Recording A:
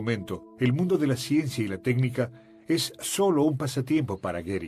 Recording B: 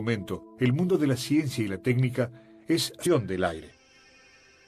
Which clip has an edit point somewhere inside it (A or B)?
A